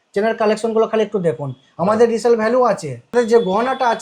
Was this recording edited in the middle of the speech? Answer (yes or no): yes